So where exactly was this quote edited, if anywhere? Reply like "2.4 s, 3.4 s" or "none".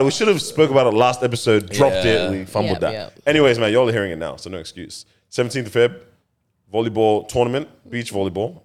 none